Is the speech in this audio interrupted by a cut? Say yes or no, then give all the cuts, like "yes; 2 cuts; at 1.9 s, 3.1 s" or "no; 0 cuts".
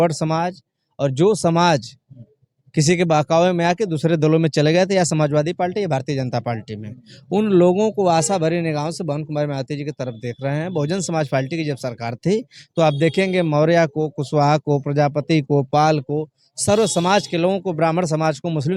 no; 0 cuts